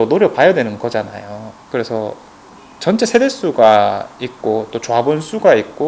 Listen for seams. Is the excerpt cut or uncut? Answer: uncut